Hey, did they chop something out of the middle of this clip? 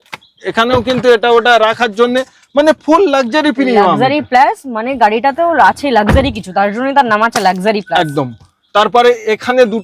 no; 0 cuts

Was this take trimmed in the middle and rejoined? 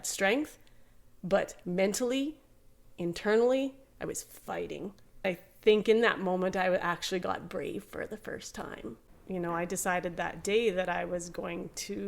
yes; 2 cuts; at 5.2 s, 9.0 s

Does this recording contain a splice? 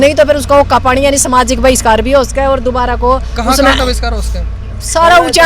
no; 0 cuts

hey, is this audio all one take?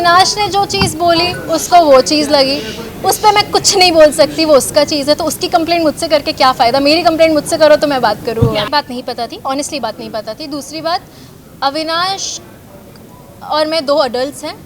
no; 1 cut; at 8.7 s

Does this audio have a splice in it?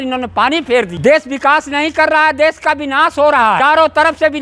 yes; 2 cuts; at 0.9 s, 3.6 s

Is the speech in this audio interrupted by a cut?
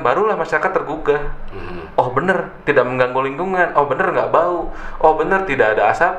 no; 0 cuts

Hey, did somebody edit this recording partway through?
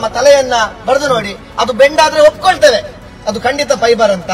no; 0 cuts

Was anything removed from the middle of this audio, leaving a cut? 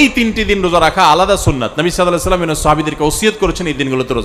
no; 0 cuts

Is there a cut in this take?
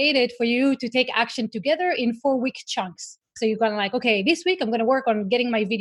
no; 0 cuts

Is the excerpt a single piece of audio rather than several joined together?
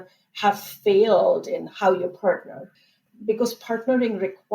no; 1 cut; at 2.8 s

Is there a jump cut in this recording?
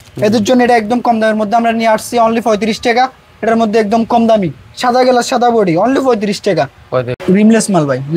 yes; 1 cut; at 7.1 s

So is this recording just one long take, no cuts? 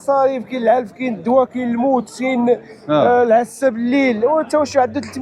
yes; 0 cuts

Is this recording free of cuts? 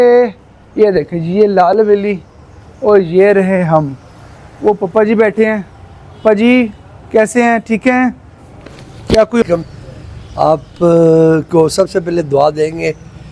no; 1 cut; at 9.4 s

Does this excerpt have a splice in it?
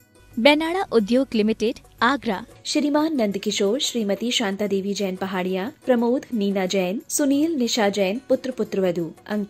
no; 0 cuts

